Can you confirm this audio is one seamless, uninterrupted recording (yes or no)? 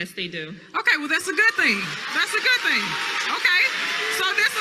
no